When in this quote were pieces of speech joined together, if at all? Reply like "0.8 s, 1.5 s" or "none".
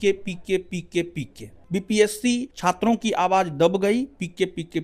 1.5 s, 2.5 s